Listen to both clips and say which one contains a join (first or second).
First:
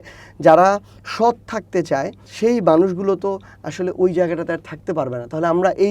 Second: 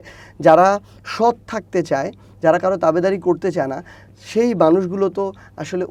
first